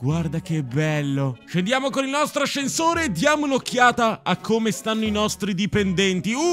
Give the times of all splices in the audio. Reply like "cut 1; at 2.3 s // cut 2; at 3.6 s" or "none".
cut 1; at 1.5 s